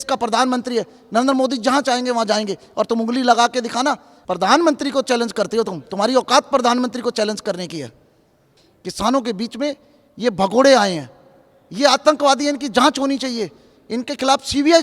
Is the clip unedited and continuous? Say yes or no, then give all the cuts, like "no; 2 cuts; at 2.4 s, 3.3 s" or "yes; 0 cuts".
no; 1 cut; at 8.4 s